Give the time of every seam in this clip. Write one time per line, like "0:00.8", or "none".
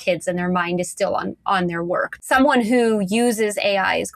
0:02.1